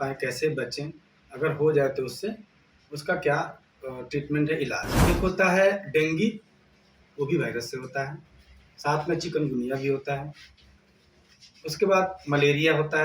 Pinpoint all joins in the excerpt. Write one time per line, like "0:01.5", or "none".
0:04.9